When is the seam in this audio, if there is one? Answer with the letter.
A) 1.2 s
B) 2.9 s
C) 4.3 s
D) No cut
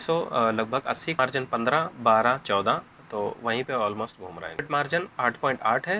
A